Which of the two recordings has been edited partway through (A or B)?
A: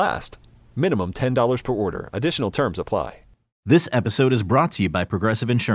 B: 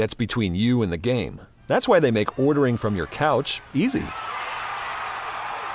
A